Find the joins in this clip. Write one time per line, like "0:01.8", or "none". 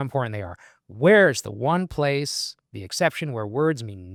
none